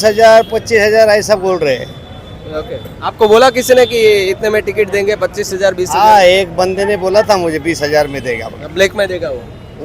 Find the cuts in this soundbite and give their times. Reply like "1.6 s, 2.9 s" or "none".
none